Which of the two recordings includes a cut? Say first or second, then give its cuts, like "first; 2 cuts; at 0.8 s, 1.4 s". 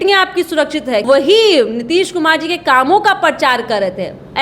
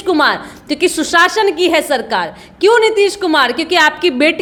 first; 1 cut; at 1.0 s